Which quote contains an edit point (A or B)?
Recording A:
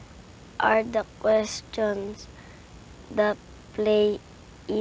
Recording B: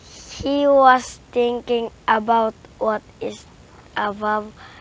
B